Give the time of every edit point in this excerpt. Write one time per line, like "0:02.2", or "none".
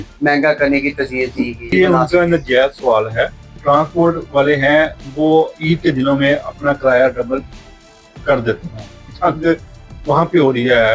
0:01.7
0:03.5
0:09.1